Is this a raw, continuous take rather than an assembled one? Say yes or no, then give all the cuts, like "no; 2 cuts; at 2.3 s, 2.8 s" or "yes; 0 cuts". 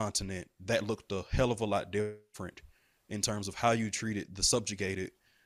yes; 0 cuts